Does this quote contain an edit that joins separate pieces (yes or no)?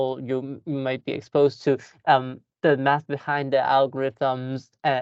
no